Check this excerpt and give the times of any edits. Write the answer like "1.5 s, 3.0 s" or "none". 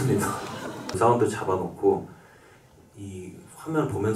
1.0 s